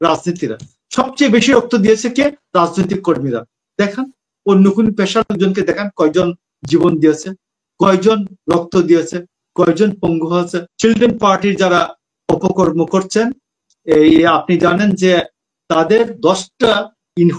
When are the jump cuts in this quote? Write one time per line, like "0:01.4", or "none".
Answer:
0:10.6